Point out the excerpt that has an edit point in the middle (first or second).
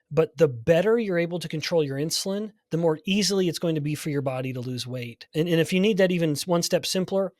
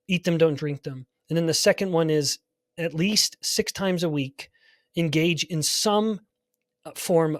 first